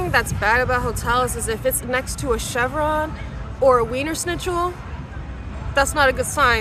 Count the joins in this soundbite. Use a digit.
0